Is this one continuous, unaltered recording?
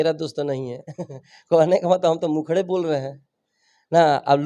yes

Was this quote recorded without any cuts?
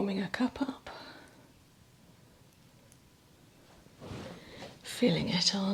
yes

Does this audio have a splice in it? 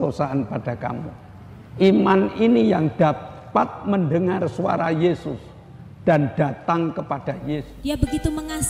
yes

